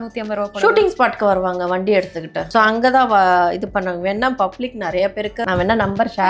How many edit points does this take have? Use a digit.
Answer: 2